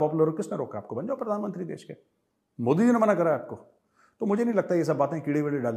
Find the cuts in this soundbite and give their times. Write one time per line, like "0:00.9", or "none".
none